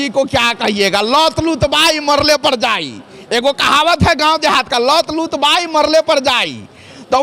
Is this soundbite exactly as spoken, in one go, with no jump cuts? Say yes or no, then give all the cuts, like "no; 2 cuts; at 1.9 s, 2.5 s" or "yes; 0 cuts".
yes; 0 cuts